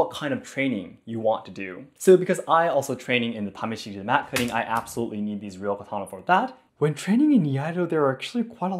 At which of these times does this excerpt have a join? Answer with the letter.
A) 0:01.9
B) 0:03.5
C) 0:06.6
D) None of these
C